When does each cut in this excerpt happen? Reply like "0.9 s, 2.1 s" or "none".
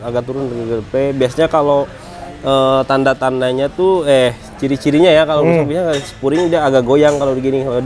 none